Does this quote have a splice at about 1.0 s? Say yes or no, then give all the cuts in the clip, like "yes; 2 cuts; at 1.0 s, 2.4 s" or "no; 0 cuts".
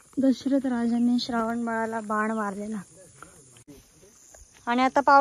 no; 1 cut; at 3.7 s